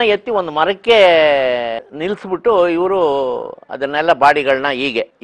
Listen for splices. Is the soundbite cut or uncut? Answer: uncut